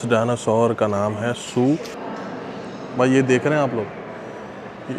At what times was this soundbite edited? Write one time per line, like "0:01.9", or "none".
0:02.0